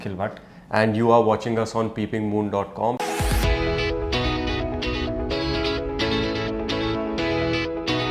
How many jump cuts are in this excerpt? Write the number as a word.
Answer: one